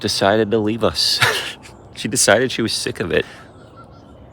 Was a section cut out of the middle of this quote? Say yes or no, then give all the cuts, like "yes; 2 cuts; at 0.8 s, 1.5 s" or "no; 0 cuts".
yes; 1 cut; at 3.3 s